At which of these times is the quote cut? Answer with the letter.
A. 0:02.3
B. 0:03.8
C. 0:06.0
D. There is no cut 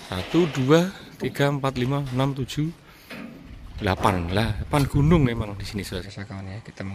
C